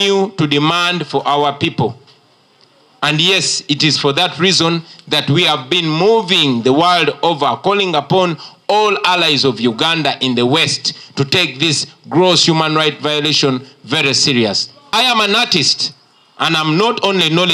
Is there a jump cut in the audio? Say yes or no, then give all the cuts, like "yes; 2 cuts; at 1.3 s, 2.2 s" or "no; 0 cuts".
yes; 1 cut; at 14.9 s